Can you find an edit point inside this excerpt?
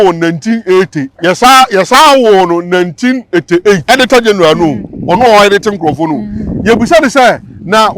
yes; 2 cuts; at 1.0 s, 3.8 s

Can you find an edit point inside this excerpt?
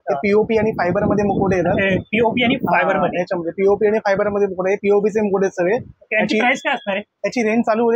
no; 0 cuts

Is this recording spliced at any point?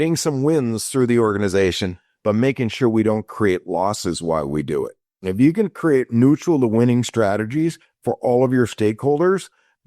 yes; 1 cut; at 5.2 s

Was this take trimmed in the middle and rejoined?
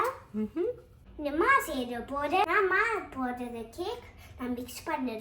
yes; 2 cuts; at 1.0 s, 2.4 s

